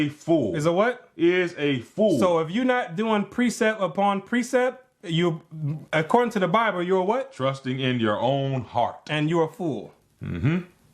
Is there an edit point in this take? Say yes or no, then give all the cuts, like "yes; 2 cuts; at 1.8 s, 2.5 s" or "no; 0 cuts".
yes; 1 cut; at 2.5 s